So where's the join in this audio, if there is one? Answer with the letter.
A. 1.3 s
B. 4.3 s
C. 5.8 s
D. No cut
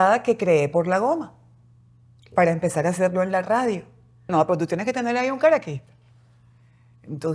B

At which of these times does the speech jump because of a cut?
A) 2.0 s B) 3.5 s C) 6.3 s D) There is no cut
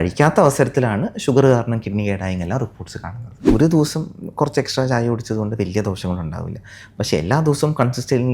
B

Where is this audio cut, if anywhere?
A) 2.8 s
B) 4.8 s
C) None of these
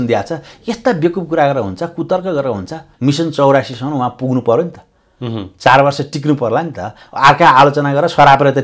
A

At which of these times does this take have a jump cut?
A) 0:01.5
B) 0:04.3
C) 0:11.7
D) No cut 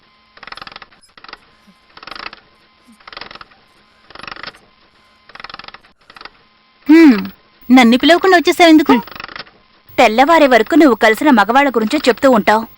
A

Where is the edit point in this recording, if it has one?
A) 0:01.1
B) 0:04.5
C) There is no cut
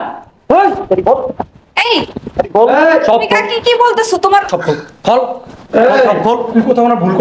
B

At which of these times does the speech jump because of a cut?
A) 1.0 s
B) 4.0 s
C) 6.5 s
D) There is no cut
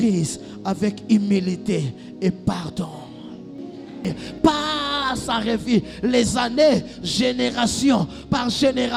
B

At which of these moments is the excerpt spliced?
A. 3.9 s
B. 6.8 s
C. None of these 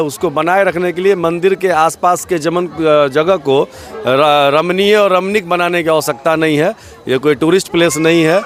C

